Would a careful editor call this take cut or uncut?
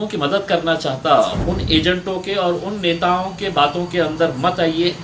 cut